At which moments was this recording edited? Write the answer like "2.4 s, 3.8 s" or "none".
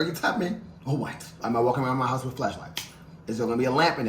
1.4 s